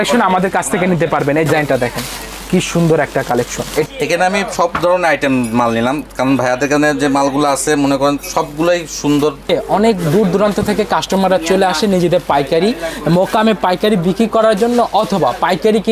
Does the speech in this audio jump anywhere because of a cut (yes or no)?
yes